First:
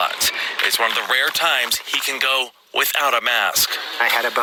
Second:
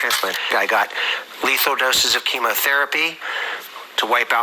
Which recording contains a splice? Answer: second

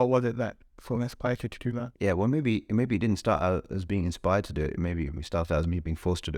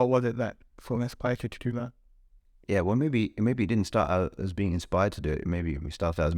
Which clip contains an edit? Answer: first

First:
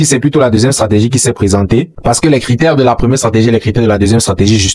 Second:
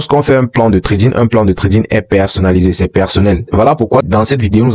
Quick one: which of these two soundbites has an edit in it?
second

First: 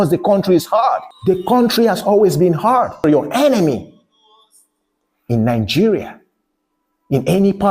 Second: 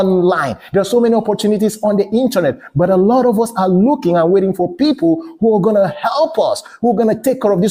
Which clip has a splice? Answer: first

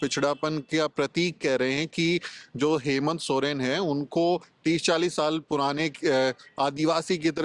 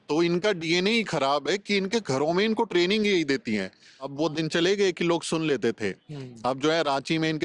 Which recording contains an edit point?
second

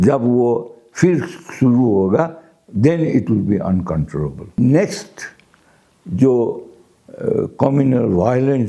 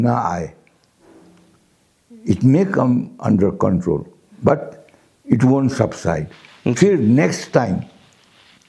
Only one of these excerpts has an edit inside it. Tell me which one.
first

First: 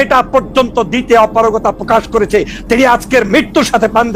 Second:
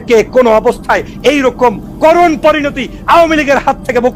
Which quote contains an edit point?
first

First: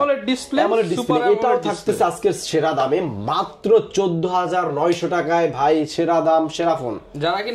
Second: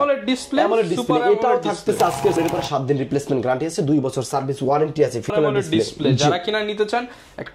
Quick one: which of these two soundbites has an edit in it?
second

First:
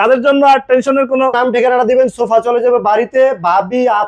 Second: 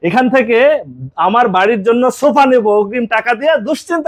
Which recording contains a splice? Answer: first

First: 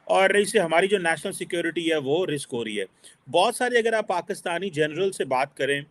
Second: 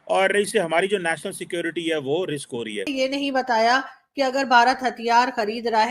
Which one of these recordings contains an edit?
second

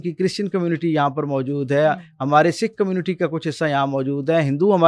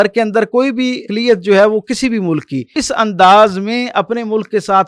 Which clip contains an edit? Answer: second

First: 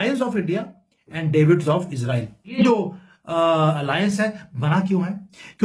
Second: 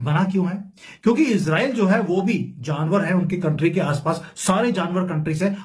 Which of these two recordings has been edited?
first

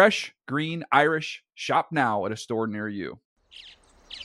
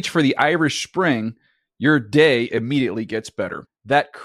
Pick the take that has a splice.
first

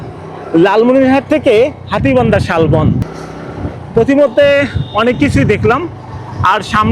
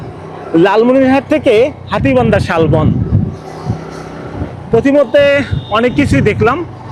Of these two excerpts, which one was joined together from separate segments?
first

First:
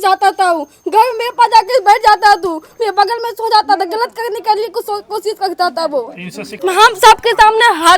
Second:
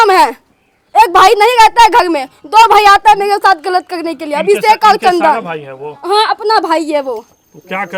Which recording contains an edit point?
first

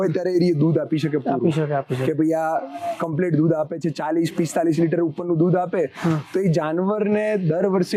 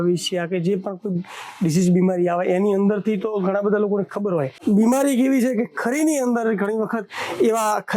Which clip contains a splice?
second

